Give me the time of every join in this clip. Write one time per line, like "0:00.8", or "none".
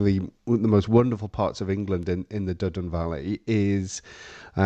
none

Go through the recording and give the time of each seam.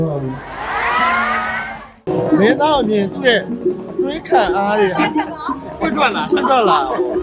0:02.0

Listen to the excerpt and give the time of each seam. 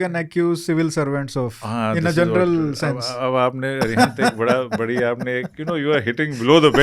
none

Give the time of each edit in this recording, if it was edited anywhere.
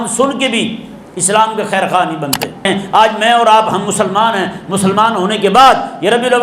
0:02.6

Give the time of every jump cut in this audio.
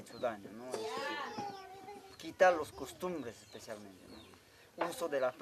none

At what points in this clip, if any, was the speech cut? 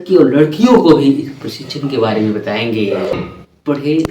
0:03.2

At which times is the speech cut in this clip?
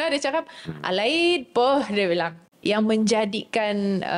0:02.4

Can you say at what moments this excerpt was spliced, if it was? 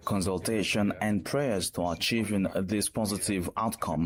none

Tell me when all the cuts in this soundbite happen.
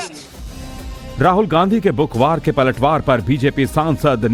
none

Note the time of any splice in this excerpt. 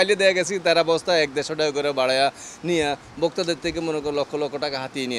none

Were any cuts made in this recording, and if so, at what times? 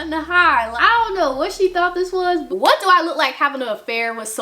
0:02.4

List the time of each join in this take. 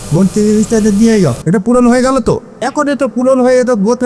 0:01.4
0:02.5

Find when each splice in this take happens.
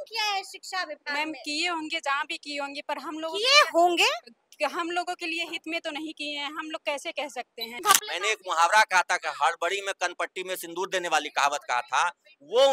0:07.8

